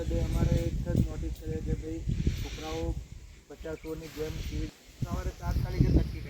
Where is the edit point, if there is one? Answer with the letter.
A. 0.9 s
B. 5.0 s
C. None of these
B